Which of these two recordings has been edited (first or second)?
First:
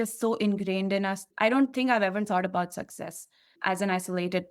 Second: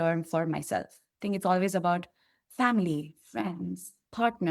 first